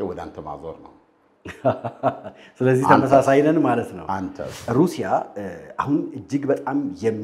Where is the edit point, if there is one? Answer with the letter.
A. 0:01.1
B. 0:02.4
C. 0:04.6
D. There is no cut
C